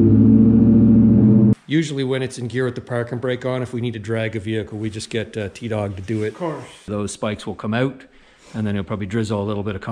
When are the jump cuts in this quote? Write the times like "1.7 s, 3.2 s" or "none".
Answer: 1.5 s, 6.8 s